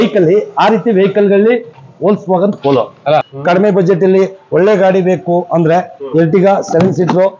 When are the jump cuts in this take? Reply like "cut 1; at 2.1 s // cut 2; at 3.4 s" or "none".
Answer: cut 1; at 3.2 s